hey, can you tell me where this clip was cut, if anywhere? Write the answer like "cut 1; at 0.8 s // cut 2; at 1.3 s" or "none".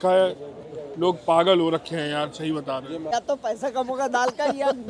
cut 1; at 3.1 s